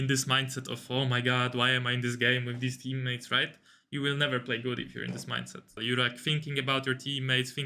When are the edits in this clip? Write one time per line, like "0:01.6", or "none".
0:05.8